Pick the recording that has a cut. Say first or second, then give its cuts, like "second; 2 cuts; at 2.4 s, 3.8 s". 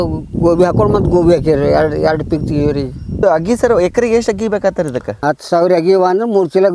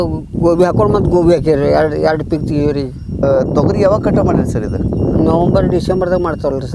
first; 2 cuts; at 3.2 s, 5.2 s